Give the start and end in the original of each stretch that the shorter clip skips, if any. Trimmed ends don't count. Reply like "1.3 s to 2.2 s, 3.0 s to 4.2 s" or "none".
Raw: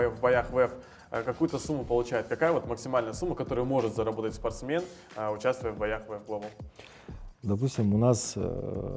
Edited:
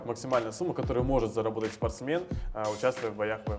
none